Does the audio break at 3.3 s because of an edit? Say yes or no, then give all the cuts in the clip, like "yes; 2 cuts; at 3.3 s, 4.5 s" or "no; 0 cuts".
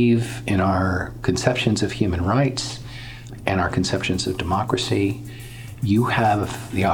yes; 1 cut; at 3.3 s